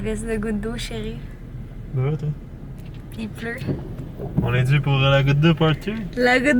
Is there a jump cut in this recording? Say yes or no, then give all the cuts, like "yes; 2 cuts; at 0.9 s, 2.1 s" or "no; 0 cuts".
no; 0 cuts